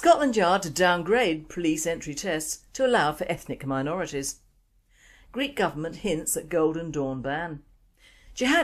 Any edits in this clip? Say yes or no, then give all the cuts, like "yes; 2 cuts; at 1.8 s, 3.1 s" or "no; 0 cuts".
yes; 1 cut; at 1.8 s